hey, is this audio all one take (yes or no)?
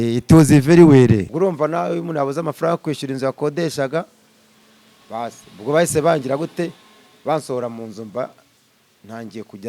no